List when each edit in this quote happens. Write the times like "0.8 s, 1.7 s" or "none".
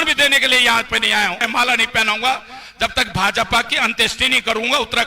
1.4 s